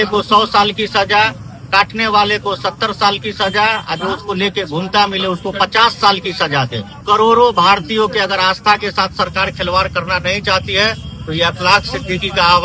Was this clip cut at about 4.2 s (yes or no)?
no